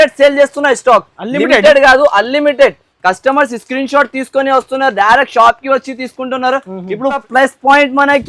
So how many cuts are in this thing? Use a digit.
1